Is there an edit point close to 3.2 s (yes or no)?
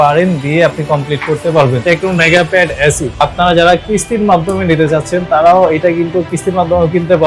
yes